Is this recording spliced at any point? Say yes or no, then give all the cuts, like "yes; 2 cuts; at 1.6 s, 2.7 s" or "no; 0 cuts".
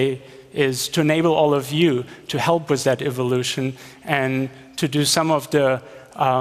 no; 0 cuts